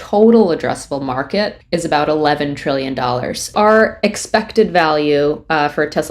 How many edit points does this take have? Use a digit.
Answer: 2